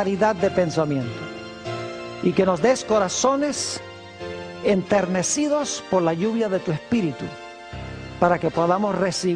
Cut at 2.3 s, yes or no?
no